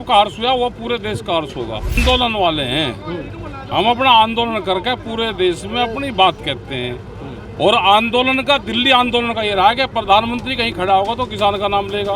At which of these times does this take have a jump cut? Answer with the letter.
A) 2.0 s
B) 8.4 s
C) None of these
A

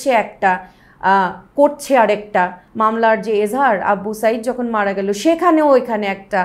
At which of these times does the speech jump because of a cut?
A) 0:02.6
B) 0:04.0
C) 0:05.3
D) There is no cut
A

